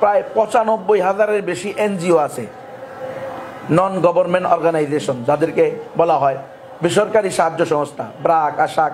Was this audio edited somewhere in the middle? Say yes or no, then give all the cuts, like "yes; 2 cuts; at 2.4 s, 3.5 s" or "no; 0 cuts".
no; 0 cuts